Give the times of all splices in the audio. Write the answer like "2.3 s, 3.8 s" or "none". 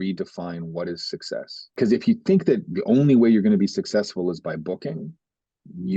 none